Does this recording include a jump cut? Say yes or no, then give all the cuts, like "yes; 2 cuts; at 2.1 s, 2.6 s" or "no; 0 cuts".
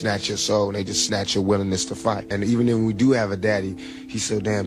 yes; 1 cut; at 2.5 s